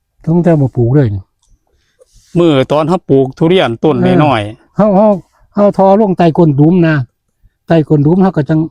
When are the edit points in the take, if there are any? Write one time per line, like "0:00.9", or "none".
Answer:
none